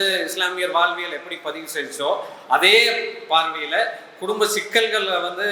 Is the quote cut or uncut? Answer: uncut